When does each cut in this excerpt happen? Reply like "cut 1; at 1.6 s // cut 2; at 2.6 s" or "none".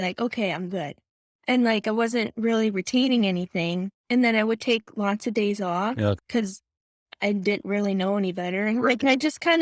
cut 1; at 4.0 s // cut 2; at 6.2 s

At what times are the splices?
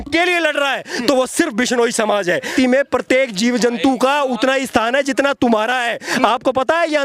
cut 1; at 2.5 s

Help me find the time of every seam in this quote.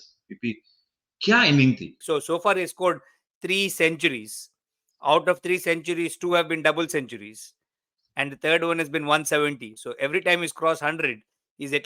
cut 1; at 2.0 s

